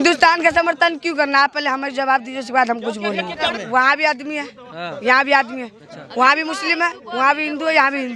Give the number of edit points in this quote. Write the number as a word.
one